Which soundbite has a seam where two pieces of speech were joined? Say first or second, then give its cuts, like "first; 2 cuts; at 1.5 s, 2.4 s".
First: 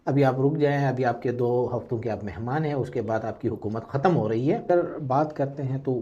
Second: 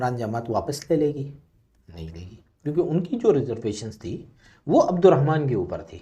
first; 1 cut; at 4.7 s